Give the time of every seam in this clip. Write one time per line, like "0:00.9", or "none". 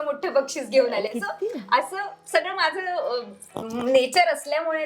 none